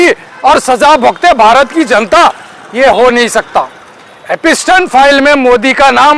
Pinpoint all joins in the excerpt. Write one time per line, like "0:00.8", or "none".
none